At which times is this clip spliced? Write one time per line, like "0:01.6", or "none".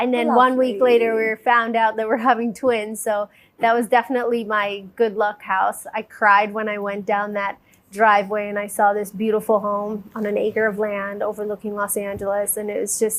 none